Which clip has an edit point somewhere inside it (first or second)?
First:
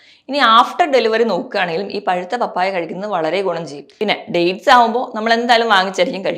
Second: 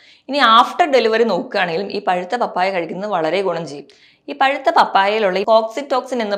first